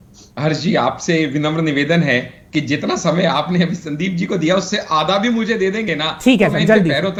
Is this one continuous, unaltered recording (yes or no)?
yes